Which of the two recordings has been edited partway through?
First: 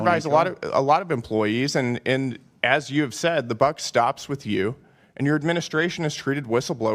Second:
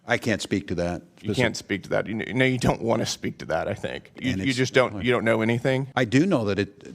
second; 2 cuts; at 4.1 s, 5.9 s

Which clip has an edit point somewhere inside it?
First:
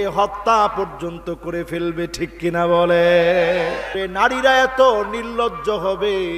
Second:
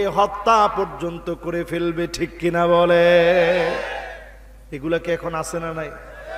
first; 1 cut; at 3.9 s

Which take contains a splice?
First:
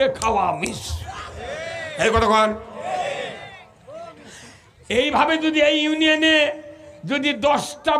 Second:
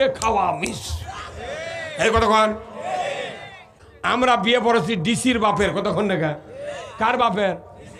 second; 1 cut; at 4.2 s

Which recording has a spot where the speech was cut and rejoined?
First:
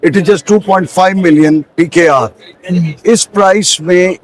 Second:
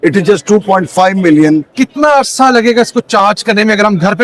second; 1 cut; at 1.7 s

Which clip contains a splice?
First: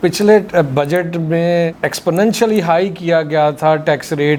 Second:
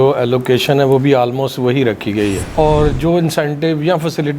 second; 1 cut; at 2.4 s

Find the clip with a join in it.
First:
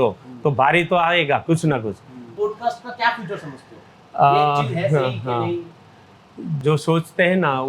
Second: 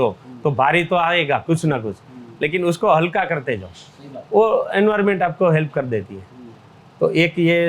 first; 2 cuts; at 2.2 s, 6.6 s

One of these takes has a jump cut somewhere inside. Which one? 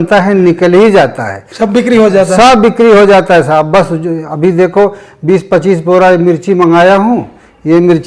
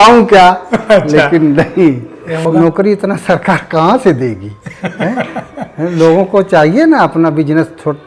second; 1 cut; at 2.4 s

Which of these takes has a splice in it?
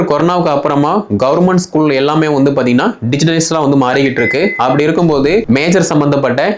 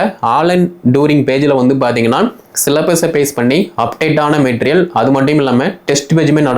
first; 1 cut; at 5.4 s

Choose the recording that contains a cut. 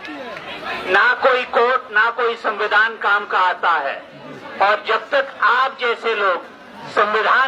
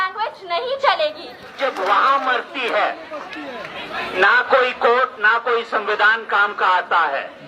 second; 1 cut; at 1.5 s

